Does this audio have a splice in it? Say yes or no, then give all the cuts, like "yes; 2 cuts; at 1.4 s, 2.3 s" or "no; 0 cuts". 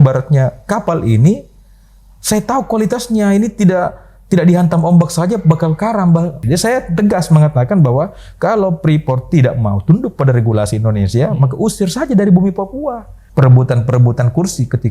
yes; 2 cuts; at 6.4 s, 13.2 s